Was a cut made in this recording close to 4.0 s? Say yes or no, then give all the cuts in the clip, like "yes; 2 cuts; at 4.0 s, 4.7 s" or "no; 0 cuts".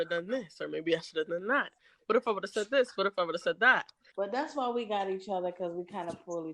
yes; 1 cut; at 4.0 s